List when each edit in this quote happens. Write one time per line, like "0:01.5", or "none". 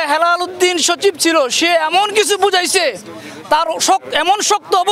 none